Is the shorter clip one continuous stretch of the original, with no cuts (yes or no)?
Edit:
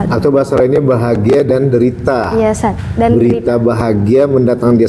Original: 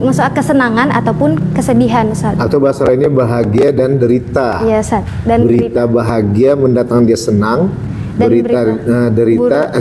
yes